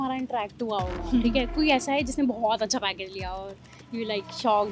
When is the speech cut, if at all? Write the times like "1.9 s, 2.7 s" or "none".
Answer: none